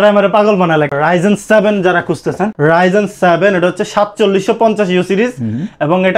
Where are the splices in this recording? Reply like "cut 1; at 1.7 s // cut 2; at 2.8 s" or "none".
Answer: cut 1; at 0.9 s // cut 2; at 2.5 s